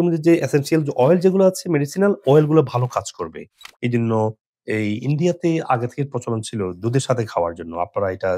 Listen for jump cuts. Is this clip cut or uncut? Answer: uncut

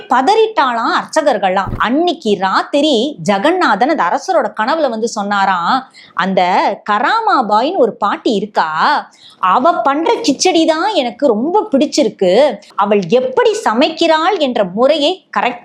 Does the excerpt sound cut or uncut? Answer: cut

